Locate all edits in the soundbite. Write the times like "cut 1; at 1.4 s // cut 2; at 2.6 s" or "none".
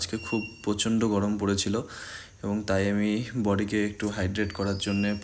none